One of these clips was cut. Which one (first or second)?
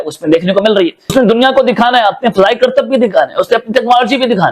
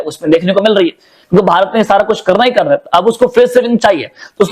first